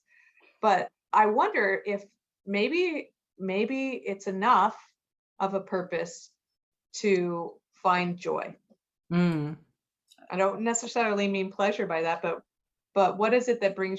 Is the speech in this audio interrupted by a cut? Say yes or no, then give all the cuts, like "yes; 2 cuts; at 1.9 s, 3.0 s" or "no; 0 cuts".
no; 0 cuts